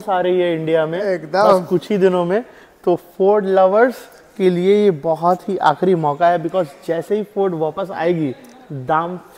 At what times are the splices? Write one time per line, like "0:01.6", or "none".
none